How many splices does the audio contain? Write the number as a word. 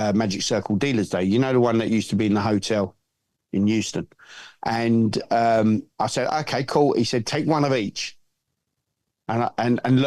zero